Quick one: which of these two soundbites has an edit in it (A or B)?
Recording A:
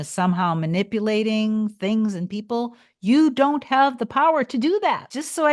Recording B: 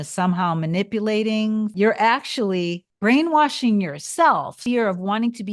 B